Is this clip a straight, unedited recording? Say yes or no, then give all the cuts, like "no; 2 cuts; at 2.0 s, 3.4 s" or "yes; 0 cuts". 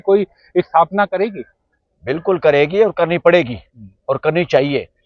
yes; 0 cuts